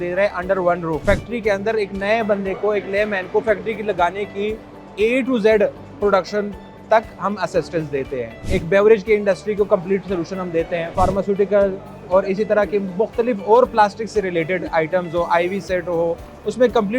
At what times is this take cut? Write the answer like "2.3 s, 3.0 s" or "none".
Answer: 1.0 s, 8.4 s, 10.9 s